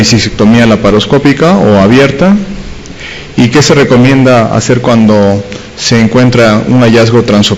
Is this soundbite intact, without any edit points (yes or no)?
yes